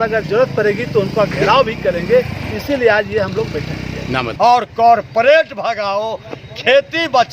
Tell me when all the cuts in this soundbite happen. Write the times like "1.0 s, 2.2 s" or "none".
4.3 s